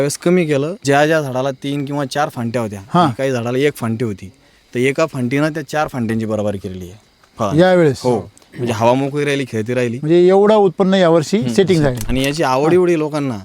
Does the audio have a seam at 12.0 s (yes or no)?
yes